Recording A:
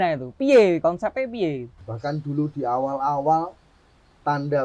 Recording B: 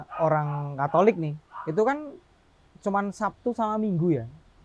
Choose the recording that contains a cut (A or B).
A